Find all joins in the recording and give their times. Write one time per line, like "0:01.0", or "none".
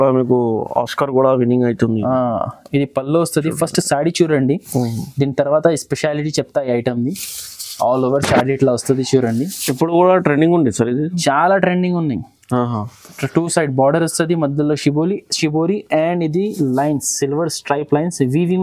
none